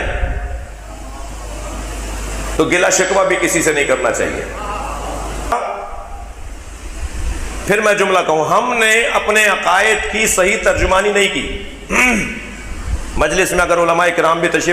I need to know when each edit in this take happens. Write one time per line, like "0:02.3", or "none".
0:05.5